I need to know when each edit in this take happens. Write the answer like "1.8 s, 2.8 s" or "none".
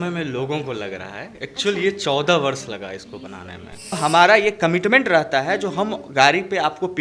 3.9 s